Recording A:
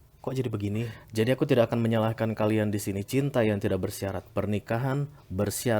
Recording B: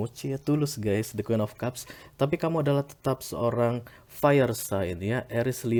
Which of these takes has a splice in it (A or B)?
A